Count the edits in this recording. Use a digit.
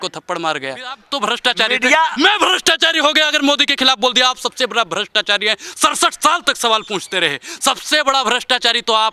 1